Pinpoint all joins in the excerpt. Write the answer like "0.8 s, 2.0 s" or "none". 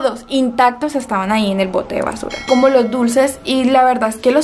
2.4 s